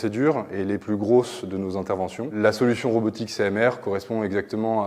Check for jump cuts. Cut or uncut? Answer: cut